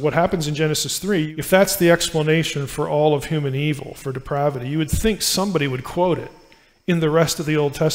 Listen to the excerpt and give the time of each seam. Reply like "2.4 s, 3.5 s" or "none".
1.3 s